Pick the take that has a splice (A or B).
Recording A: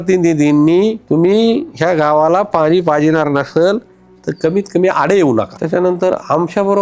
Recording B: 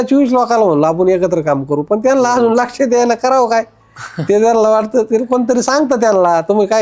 A